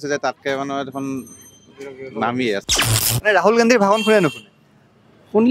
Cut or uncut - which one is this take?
cut